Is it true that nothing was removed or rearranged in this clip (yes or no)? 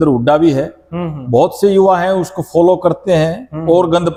yes